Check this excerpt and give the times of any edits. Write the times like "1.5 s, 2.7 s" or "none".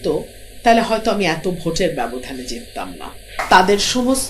3.3 s